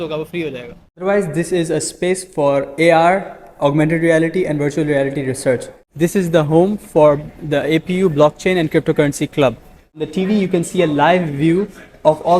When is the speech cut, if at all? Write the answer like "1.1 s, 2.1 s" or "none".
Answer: 1.0 s, 5.8 s, 10.1 s